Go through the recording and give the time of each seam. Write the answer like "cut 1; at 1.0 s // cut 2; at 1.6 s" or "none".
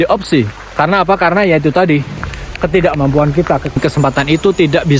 cut 1; at 3.7 s